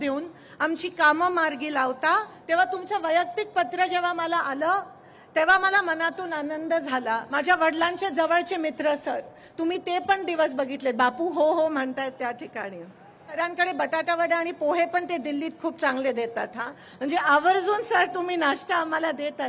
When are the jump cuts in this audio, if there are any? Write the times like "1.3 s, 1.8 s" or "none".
2.3 s, 7.3 s, 13.3 s